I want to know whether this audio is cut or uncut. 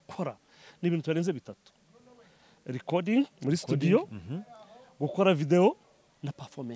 uncut